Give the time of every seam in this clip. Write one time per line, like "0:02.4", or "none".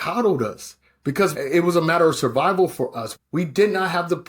0:01.3
0:03.0